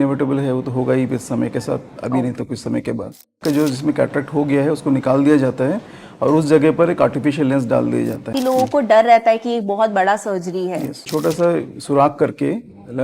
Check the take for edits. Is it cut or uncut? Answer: cut